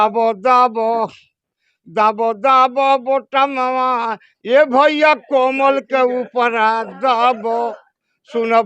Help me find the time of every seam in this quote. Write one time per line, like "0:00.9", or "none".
none